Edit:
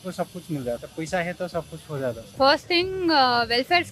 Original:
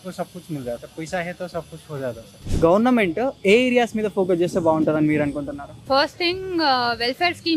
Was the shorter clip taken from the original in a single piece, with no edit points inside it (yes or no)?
no